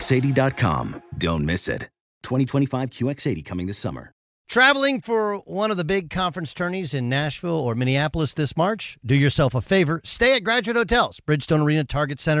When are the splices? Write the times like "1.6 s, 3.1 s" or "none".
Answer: 4.3 s